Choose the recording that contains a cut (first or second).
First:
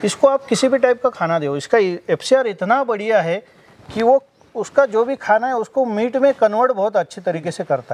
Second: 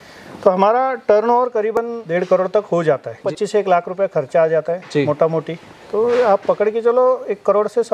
second